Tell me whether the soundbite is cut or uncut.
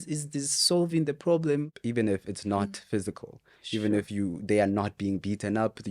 cut